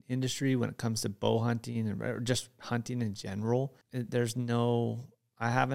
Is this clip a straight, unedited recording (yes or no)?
no